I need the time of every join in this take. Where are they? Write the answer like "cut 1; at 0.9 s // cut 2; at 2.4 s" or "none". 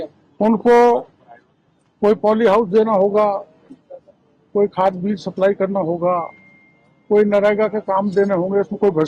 none